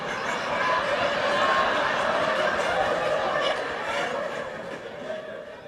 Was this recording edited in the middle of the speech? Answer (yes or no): no